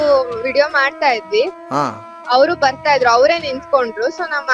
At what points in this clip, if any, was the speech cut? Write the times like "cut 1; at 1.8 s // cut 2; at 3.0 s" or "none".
none